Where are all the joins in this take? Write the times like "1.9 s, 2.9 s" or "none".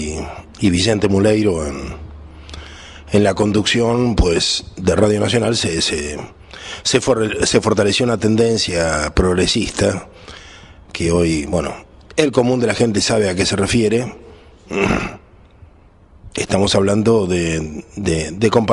none